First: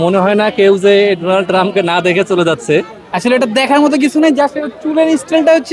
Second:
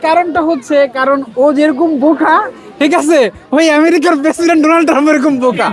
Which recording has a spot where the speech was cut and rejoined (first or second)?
first